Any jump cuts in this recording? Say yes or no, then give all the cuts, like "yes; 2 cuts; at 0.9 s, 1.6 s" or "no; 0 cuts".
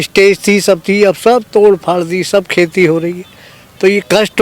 no; 0 cuts